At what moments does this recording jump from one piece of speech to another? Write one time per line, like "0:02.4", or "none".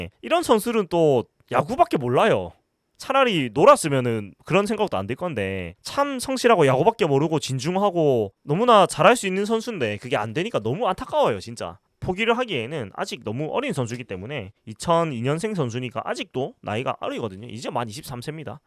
0:11.8